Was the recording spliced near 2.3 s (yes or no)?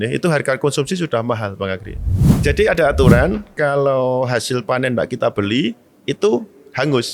yes